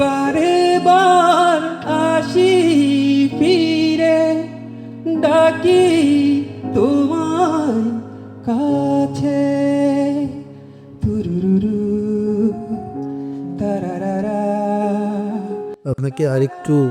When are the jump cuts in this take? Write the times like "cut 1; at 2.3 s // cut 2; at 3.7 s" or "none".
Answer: cut 1; at 15.7 s